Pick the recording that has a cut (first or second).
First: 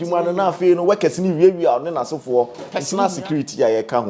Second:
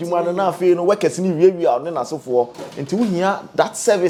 first